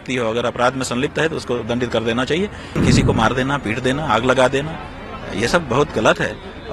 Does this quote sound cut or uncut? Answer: cut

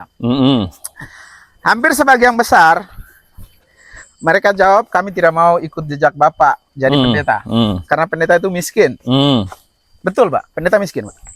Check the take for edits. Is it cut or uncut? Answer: uncut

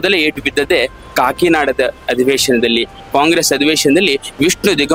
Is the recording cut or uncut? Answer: uncut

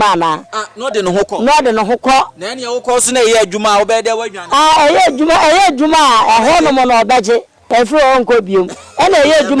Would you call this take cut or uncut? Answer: cut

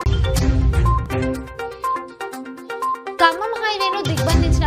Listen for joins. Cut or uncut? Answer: uncut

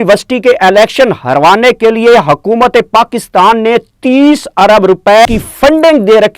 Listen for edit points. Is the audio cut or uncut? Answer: cut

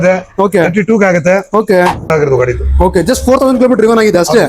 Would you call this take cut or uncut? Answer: cut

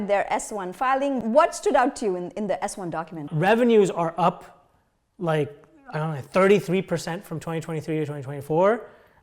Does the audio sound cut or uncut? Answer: cut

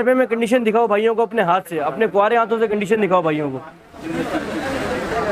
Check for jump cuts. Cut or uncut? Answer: uncut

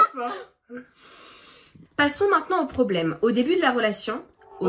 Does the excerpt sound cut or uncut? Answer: cut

